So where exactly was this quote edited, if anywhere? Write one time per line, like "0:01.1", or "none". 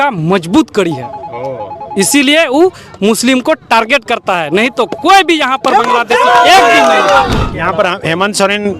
0:07.4